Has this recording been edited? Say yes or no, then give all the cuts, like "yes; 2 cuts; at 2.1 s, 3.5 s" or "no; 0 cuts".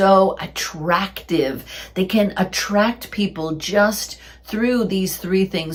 no; 0 cuts